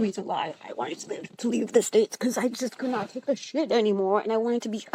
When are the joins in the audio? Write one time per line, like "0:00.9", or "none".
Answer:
none